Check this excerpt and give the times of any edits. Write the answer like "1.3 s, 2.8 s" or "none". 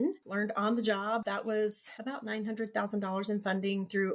1.3 s